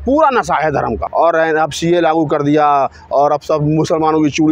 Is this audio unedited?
no; 1 cut; at 1.0 s

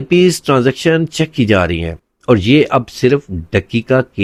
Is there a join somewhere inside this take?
no; 0 cuts

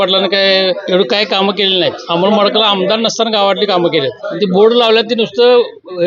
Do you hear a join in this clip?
yes; 3 cuts; at 0.8 s, 2.0 s, 4.2 s

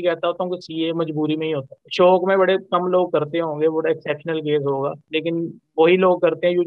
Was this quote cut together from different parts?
yes; 1 cut; at 1.8 s

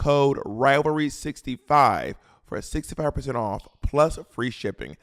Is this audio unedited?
yes; 0 cuts

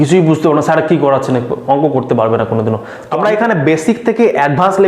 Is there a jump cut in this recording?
yes; 1 cut; at 3.0 s

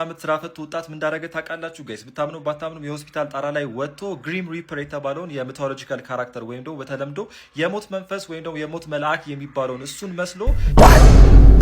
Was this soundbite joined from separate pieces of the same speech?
yes; 1 cut; at 10.6 s

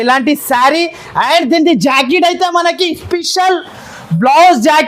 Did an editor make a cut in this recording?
no; 0 cuts

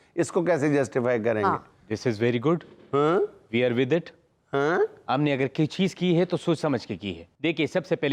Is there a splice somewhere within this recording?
no; 0 cuts

